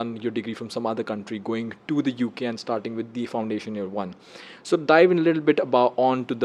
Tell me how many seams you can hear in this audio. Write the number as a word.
zero